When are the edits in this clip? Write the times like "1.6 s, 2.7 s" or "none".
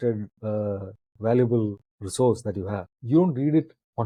none